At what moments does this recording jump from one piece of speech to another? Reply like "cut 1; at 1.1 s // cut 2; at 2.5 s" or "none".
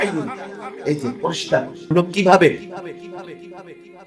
cut 1; at 1.9 s